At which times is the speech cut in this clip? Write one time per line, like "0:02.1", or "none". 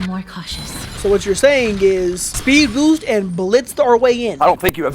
0:00.9
0:02.3